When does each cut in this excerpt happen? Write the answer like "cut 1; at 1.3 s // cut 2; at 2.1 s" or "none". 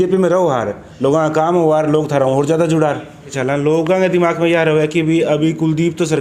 cut 1; at 3.4 s

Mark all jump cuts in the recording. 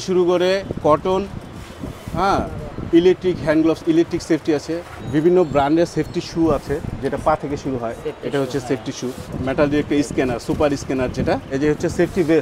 cut 1; at 4.9 s // cut 2; at 9.3 s // cut 3; at 11.5 s

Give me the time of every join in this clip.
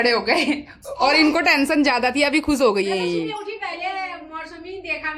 none

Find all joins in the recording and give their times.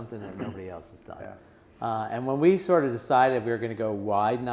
none

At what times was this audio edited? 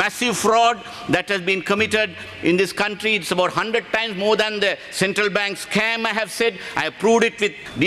none

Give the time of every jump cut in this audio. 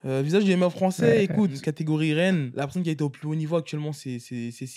cut 1; at 1.6 s // cut 2; at 2.5 s

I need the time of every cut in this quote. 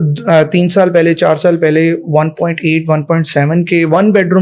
none

